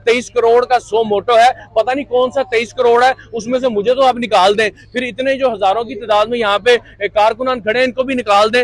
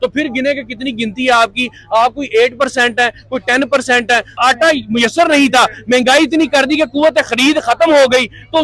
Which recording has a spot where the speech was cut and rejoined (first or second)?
second